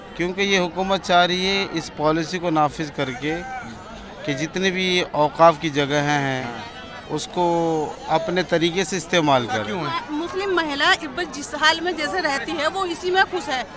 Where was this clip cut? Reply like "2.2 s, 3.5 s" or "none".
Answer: 9.9 s